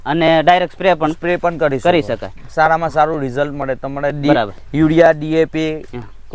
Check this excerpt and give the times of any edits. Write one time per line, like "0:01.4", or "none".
none